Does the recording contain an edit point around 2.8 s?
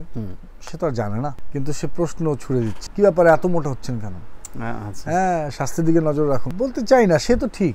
yes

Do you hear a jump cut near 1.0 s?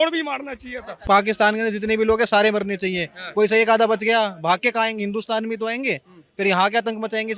yes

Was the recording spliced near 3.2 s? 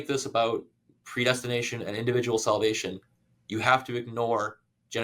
no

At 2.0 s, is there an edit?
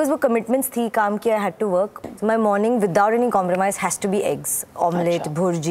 yes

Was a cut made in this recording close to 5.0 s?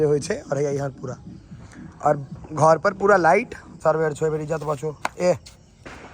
no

